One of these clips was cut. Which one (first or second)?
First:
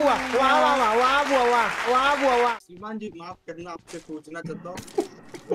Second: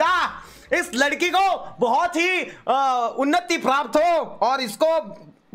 first